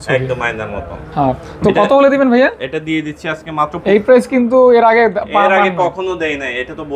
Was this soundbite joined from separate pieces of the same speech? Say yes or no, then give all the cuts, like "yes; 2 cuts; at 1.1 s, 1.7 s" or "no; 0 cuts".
yes; 1 cut; at 3.7 s